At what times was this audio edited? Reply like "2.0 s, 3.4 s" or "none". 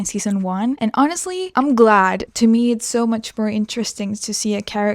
0.8 s, 1.5 s, 2.2 s

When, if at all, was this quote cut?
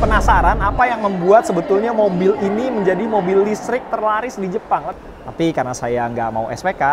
4.9 s

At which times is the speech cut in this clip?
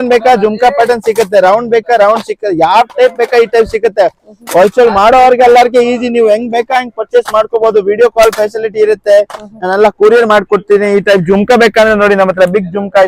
none

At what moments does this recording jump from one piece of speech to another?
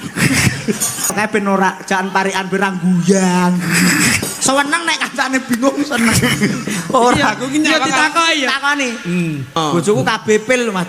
1.1 s, 9.6 s

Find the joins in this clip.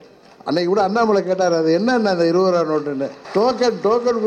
3.2 s

